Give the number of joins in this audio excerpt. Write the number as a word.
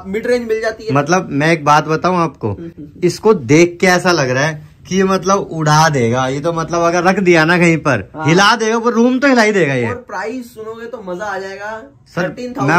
zero